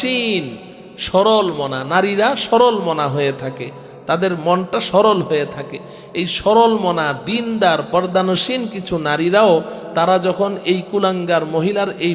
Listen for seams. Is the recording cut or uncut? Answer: uncut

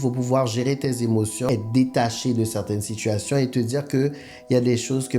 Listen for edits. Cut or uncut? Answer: cut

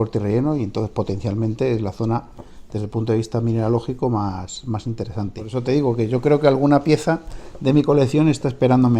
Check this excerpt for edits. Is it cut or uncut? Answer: cut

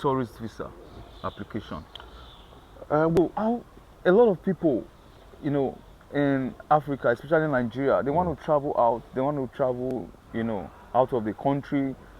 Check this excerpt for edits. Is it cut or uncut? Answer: cut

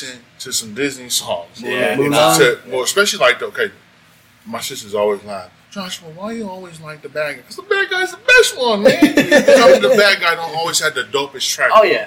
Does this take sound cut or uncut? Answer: uncut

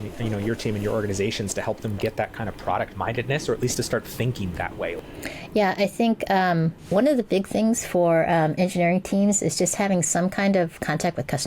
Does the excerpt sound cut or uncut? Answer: cut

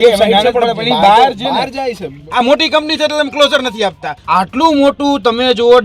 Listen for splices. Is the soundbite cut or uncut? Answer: cut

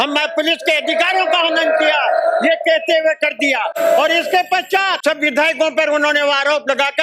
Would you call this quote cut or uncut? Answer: cut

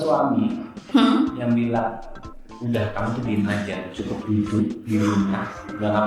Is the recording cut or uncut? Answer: uncut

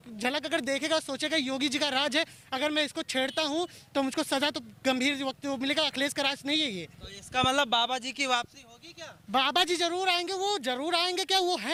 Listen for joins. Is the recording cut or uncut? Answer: uncut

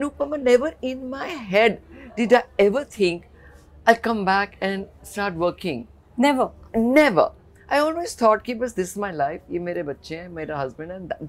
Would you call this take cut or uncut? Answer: uncut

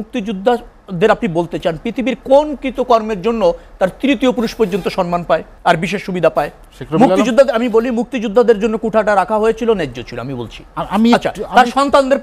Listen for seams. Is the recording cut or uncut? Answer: cut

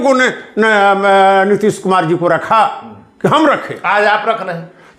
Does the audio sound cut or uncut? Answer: uncut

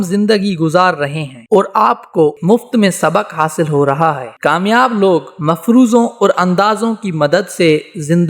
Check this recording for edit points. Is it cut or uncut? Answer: cut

